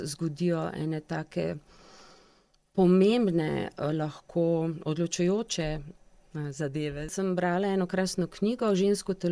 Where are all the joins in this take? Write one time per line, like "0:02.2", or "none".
0:07.1